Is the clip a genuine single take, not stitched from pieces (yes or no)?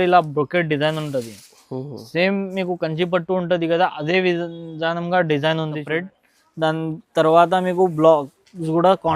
no